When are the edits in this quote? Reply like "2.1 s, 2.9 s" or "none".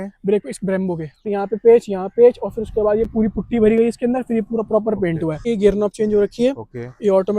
1.3 s, 5.4 s